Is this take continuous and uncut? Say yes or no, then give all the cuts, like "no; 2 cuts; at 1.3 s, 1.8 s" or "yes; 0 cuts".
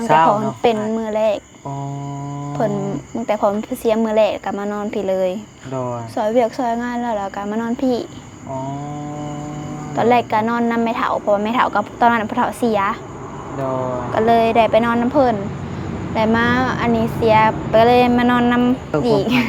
yes; 0 cuts